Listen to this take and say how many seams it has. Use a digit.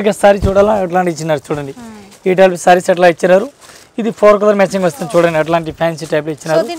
0